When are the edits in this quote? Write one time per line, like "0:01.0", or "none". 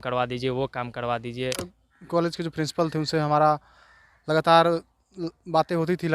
0:01.8